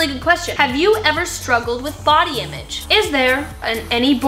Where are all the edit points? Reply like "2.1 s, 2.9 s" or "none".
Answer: 2.8 s